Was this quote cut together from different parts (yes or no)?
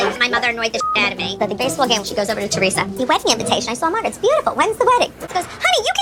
no